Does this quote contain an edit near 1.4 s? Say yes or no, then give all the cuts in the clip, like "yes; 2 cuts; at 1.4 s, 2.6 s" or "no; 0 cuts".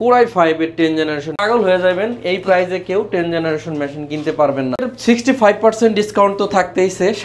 yes; 2 cuts; at 1.4 s, 4.9 s